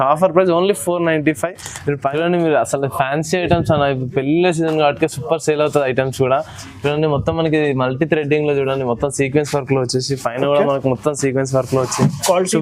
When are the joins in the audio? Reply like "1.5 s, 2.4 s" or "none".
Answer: 2.0 s